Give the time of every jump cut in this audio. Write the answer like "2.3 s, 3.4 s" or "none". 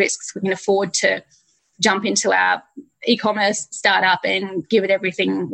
none